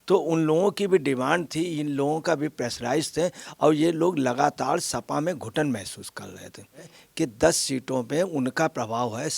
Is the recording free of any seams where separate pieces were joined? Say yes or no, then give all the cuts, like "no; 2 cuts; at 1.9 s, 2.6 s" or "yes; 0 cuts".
no; 1 cut; at 7.0 s